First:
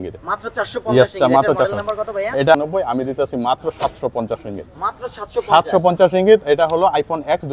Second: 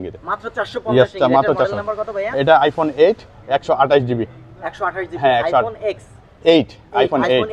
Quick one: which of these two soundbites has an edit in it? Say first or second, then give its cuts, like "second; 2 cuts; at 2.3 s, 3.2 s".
first; 1 cut; at 2.5 s